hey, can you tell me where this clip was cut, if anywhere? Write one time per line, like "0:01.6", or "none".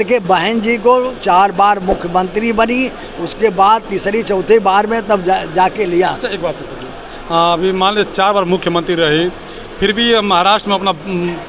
none